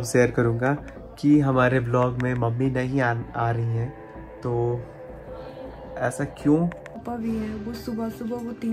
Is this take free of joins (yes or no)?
no